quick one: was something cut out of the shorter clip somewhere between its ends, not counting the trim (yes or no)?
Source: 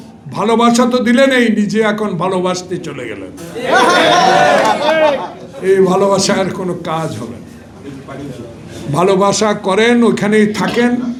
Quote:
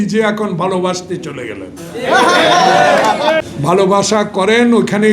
yes